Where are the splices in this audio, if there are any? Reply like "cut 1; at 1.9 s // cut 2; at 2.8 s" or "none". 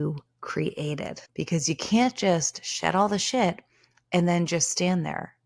cut 1; at 1.2 s